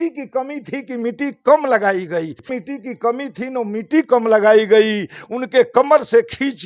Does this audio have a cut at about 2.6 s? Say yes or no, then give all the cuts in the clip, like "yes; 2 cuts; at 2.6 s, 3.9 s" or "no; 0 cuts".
yes; 1 cut; at 2.6 s